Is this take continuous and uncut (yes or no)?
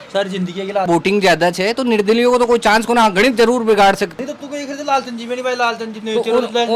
no